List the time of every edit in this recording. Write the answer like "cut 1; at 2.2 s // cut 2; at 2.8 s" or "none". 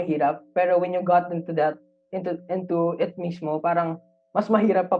none